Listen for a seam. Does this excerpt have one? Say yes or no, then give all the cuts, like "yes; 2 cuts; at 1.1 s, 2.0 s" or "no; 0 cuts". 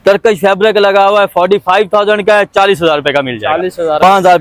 no; 0 cuts